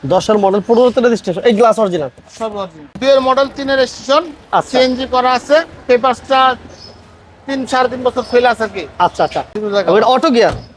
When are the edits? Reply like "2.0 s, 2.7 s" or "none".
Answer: 3.0 s, 9.5 s